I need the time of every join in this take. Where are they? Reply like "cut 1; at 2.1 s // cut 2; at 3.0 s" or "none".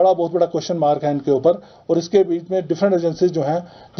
none